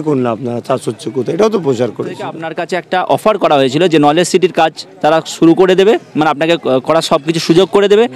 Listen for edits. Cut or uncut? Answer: cut